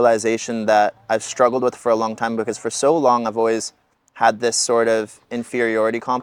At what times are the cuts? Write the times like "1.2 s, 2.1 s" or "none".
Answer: none